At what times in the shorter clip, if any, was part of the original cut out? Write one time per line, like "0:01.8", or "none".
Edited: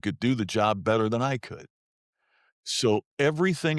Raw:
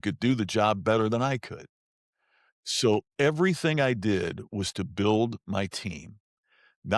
none